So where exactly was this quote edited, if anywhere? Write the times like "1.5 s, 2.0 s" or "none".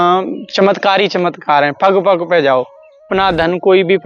3.1 s